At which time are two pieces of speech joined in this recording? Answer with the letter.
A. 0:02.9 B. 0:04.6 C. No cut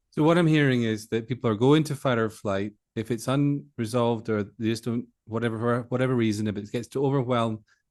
C